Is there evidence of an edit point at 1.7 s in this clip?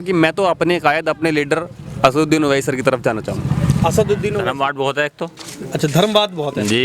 no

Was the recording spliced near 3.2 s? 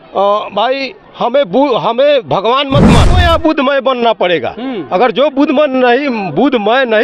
yes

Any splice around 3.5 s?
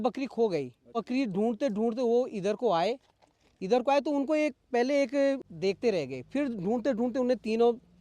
no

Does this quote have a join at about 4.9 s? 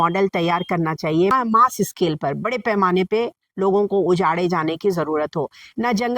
no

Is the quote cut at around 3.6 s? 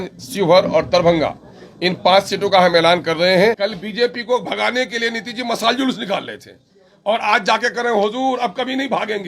yes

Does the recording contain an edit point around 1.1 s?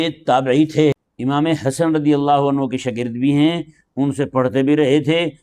yes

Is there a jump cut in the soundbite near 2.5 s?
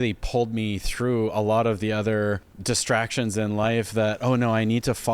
yes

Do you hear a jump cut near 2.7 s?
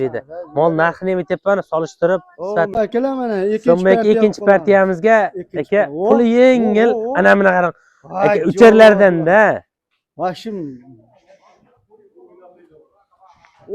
yes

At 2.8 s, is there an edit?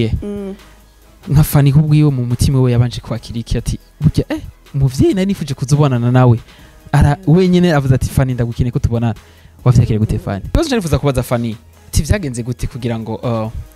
no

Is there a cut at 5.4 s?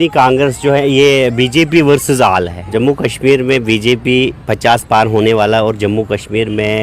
no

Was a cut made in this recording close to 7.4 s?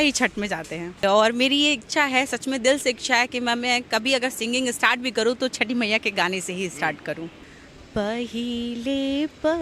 yes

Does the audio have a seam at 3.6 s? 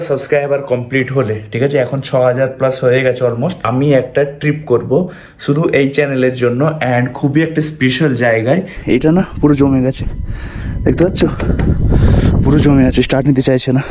yes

